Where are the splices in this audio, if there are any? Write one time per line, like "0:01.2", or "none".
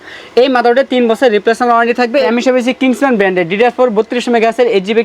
0:02.3

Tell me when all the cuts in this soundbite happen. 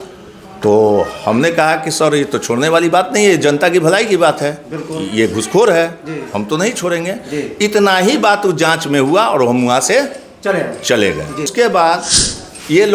0:11.5

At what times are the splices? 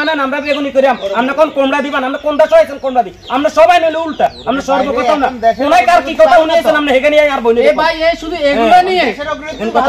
none

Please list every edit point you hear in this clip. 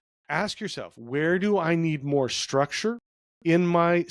none

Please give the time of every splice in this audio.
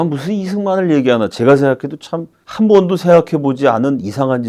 none

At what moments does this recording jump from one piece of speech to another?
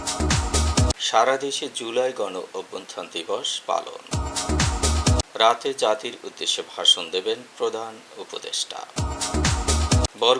0:01.0

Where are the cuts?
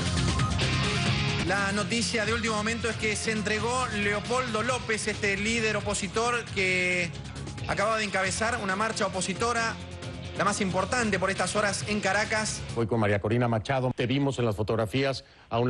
0:01.4

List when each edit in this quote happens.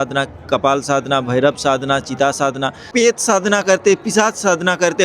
0:02.9

